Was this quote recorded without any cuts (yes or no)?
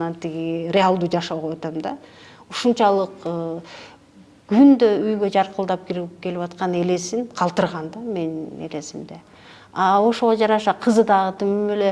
yes